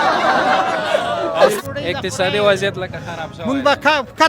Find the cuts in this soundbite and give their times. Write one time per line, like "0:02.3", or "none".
0:01.6